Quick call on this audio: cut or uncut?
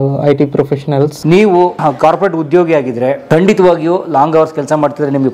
cut